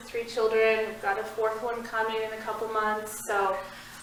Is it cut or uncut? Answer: uncut